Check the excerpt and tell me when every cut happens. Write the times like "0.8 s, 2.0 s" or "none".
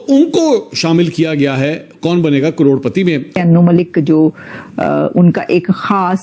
3.4 s